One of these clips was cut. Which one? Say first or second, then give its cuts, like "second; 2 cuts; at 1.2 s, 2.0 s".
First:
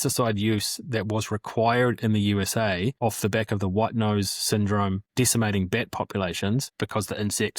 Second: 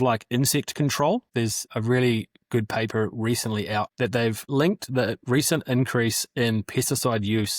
second; 1 cut; at 3.9 s